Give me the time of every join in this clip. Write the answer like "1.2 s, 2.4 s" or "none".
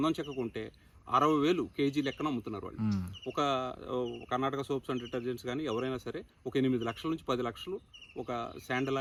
none